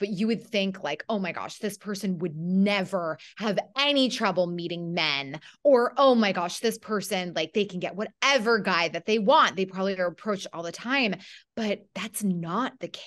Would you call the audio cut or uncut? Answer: uncut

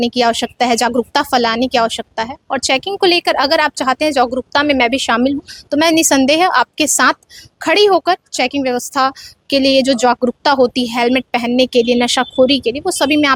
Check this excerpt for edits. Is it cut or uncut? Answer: uncut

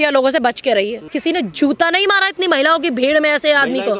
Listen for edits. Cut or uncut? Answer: cut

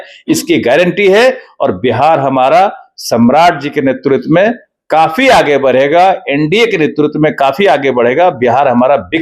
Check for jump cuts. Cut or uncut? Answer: uncut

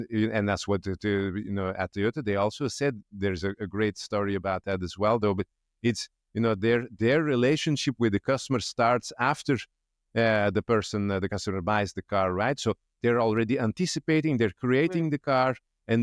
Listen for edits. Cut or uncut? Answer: uncut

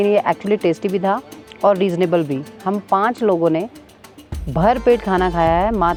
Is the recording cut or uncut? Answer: uncut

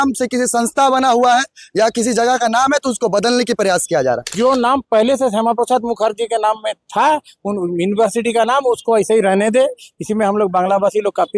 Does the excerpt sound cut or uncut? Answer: cut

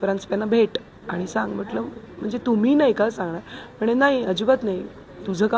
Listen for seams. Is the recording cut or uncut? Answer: uncut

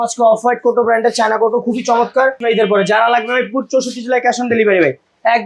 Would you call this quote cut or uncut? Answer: cut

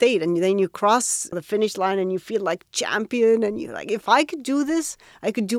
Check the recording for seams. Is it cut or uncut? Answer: cut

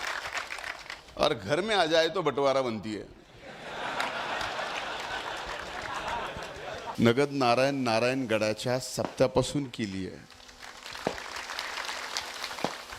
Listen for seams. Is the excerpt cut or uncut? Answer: cut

